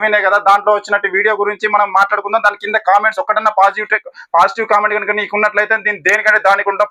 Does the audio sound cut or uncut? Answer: uncut